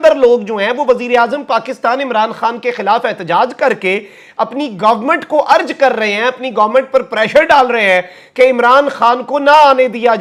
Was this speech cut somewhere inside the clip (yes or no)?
no